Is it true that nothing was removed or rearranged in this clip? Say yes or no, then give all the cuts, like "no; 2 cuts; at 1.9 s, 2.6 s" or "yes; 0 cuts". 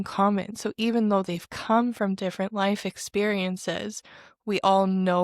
yes; 0 cuts